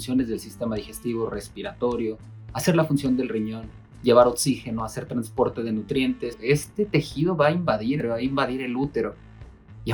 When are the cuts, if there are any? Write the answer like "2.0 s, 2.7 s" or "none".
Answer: 6.3 s, 8.0 s